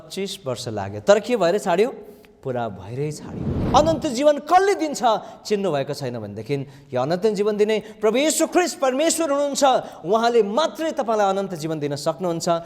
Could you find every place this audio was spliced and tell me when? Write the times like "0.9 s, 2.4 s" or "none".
3.5 s